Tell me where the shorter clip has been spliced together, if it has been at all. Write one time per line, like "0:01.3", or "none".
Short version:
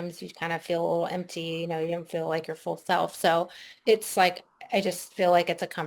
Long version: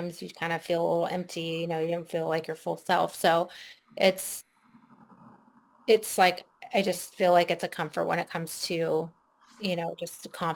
0:03.6